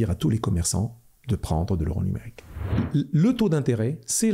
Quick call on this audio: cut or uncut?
cut